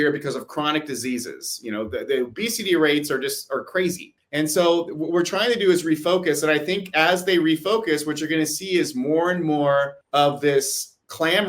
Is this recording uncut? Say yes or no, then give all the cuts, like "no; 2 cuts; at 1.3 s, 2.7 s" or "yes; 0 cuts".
no; 2 cuts; at 4.1 s, 10.0 s